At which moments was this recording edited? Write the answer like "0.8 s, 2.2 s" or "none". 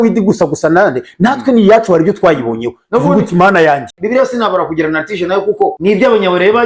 3.9 s, 5.8 s